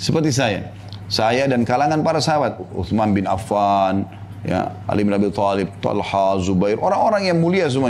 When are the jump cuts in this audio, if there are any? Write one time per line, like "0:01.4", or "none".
none